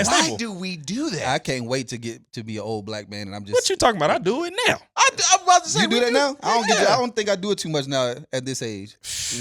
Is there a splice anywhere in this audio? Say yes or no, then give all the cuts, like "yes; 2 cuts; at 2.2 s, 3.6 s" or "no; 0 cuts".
no; 0 cuts